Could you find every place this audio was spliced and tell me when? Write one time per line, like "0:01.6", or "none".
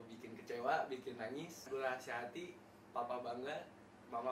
0:01.7